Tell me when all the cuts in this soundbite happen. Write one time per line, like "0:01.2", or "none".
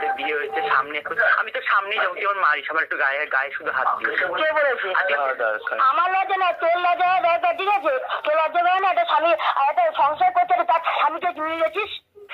0:05.2